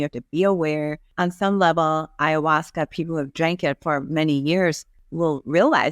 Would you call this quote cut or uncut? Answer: cut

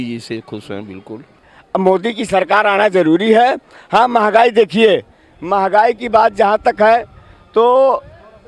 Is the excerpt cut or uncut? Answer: cut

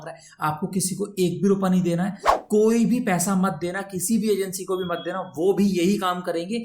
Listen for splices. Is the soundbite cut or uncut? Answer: cut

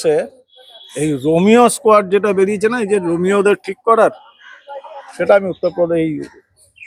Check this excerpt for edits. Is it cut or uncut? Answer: uncut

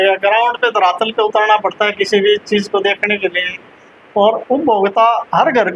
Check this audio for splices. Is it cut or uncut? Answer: uncut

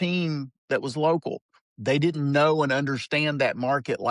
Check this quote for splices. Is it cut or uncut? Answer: uncut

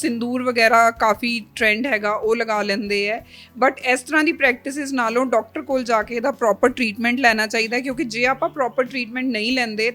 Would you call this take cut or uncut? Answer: uncut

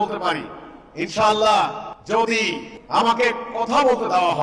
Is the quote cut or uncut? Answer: cut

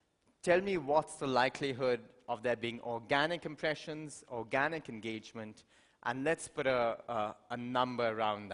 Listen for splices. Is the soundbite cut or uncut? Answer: uncut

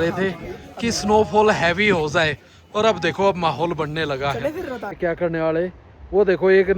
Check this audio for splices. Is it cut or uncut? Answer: cut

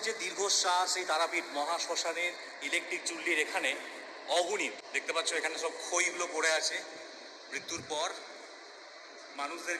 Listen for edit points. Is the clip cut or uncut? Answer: cut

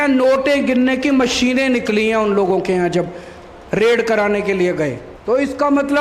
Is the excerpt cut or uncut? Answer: cut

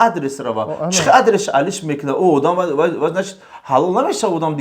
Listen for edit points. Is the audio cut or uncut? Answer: uncut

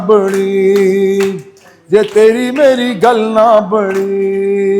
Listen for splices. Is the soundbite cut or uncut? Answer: uncut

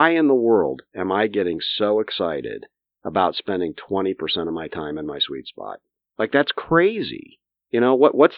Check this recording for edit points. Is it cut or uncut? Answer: uncut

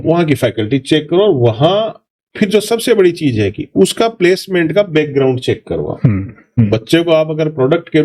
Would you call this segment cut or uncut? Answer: cut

